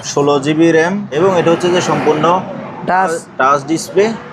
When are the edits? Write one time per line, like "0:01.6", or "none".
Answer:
0:01.1